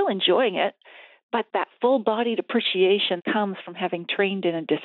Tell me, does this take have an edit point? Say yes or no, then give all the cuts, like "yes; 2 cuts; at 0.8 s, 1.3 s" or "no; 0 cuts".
yes; 2 cuts; at 1.5 s, 3.2 s